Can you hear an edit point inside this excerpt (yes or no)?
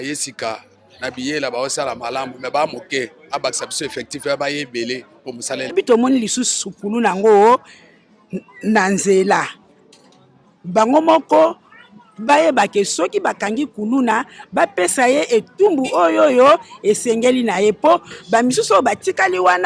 yes